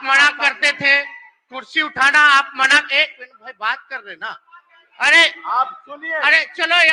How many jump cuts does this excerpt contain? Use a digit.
0